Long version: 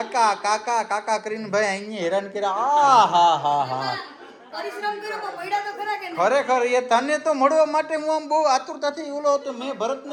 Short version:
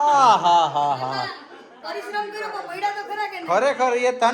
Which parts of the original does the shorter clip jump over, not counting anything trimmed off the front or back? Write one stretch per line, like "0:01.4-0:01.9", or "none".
none

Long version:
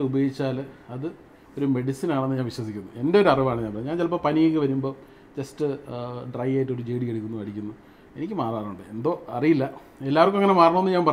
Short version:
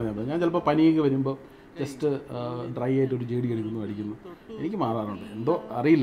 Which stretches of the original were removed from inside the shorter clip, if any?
none

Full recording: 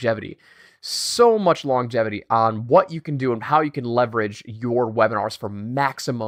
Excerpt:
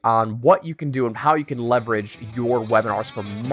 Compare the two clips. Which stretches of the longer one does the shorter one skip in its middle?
none

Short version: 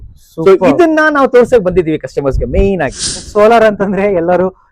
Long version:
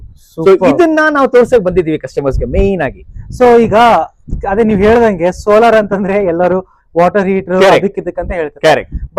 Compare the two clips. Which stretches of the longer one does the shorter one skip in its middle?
0:03.3-0:05.4

